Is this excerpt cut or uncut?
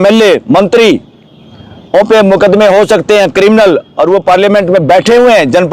uncut